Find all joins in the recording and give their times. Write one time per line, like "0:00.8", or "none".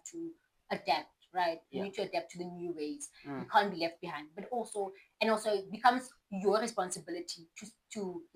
none

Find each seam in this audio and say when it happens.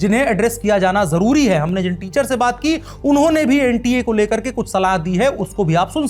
none

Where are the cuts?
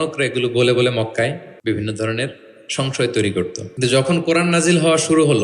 0:01.5
0:03.6

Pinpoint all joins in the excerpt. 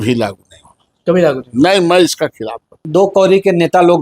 0:02.7

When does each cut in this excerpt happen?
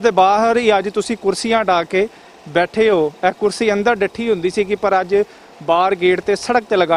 none

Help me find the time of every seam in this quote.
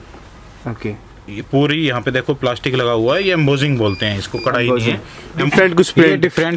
0:05.5

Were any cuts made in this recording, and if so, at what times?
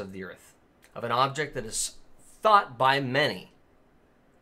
none

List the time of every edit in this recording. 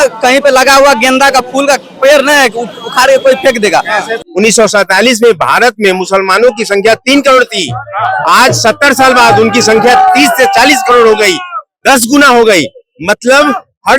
0:04.2

